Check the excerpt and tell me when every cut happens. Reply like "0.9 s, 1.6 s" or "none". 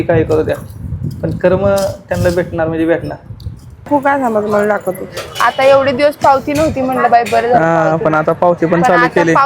3.9 s